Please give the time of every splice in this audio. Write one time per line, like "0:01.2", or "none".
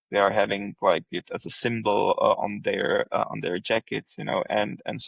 none